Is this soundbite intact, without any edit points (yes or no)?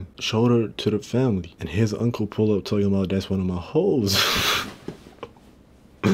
yes